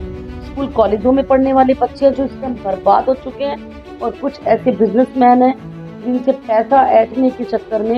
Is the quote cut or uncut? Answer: uncut